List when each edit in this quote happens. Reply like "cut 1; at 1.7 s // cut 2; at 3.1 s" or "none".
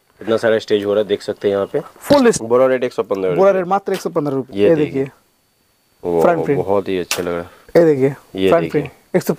cut 1; at 2.4 s // cut 2; at 4.5 s // cut 3; at 7.5 s